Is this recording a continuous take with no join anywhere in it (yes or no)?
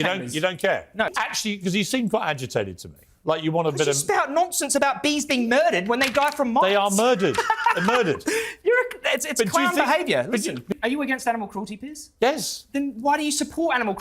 no